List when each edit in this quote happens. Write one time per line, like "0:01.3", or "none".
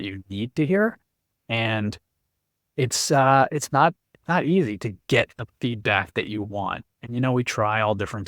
none

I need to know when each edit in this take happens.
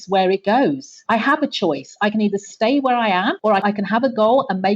0:00.9
0:03.6

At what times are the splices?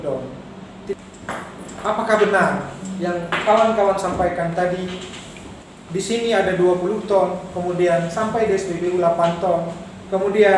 0:00.9

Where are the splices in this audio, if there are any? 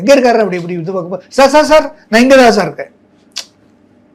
none

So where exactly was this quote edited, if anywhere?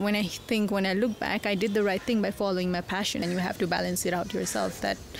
0:03.2

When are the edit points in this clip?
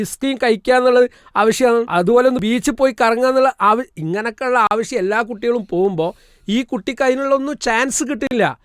0:01.9

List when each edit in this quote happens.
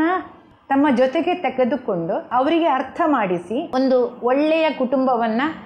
0:02.3
0:03.7

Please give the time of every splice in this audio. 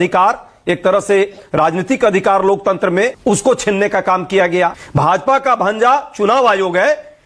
0:03.2
0:04.8

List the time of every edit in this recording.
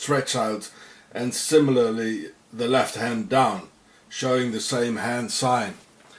0:03.1

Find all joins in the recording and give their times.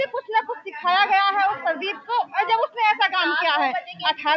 none

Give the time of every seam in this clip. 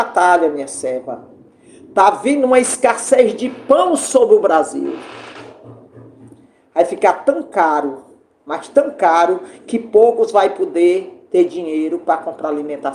none

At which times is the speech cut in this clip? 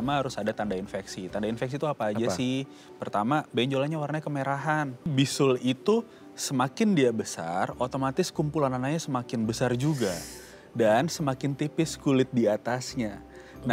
0:05.1

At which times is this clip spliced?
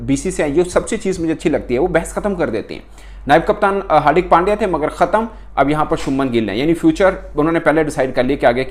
none

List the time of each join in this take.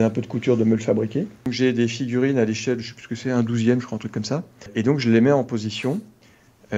0:01.4
0:04.7

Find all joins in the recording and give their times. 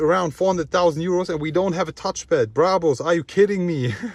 none

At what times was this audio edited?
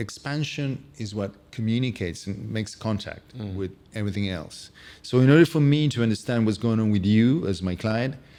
none

